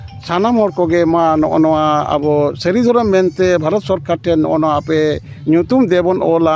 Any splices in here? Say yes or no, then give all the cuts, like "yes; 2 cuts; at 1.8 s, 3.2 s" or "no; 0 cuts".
no; 0 cuts